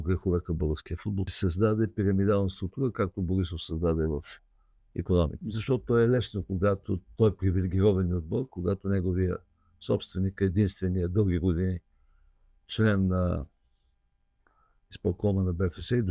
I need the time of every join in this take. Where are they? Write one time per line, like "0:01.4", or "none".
0:01.2
0:05.4